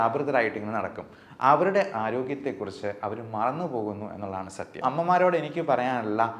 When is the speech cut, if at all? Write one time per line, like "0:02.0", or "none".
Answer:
0:04.8